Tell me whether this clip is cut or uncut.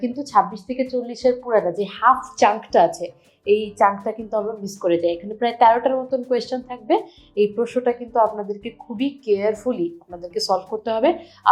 uncut